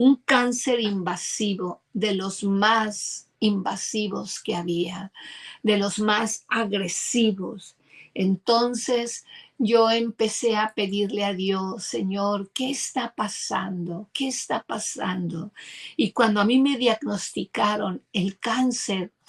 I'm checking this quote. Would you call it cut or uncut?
uncut